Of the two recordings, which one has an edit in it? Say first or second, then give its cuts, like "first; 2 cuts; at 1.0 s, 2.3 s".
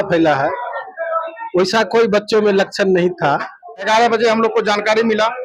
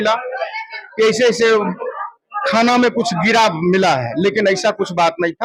first; 1 cut; at 3.9 s